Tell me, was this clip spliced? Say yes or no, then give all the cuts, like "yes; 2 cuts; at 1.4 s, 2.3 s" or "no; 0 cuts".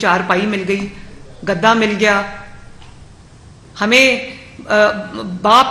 no; 0 cuts